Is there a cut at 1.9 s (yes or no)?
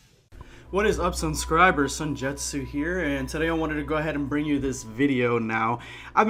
no